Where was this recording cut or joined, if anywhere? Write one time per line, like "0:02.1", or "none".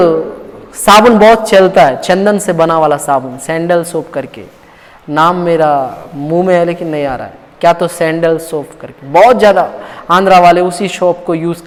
none